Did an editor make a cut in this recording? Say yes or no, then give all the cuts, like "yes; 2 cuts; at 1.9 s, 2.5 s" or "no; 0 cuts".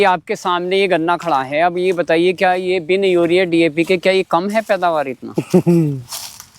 no; 0 cuts